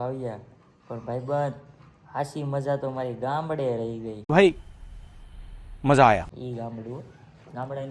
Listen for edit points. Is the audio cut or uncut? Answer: uncut